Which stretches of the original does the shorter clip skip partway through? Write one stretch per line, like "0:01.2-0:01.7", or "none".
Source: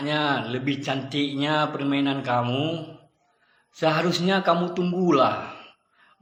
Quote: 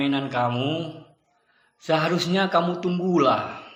none